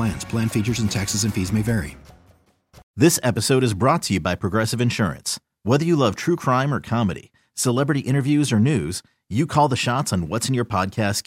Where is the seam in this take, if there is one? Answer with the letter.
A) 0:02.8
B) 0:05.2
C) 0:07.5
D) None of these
A